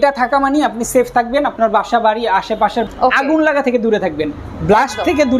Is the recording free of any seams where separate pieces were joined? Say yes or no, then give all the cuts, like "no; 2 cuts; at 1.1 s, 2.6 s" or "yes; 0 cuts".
no; 1 cut; at 2.9 s